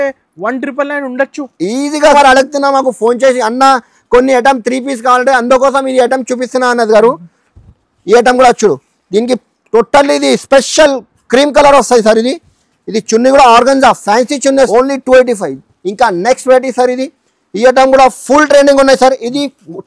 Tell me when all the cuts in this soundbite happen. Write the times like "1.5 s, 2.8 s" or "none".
2.1 s, 14.7 s